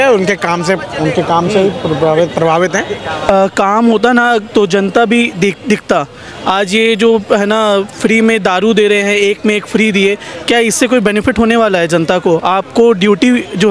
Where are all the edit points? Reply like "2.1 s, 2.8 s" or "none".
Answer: 3.3 s

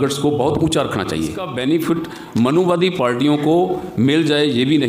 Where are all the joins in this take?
1.5 s

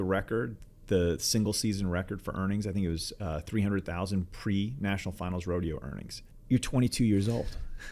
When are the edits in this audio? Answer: none

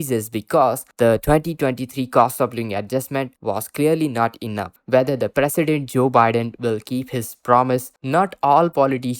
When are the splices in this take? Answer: 4.8 s, 7.9 s

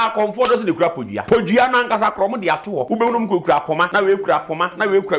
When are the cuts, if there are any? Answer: 1.1 s, 2.9 s, 3.9 s

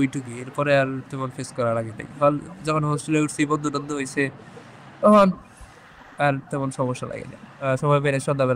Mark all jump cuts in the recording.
7.6 s

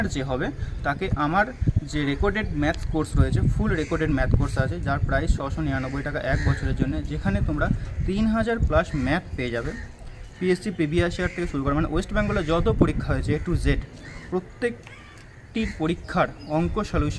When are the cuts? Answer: none

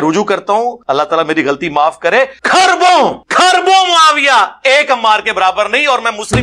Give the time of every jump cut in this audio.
0.8 s, 2.4 s, 3.2 s

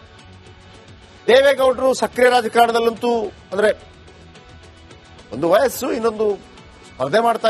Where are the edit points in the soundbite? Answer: 1.3 s

